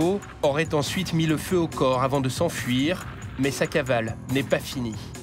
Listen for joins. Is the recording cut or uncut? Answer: uncut